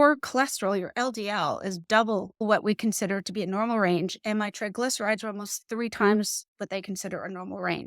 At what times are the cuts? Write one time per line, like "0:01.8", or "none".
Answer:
0:02.4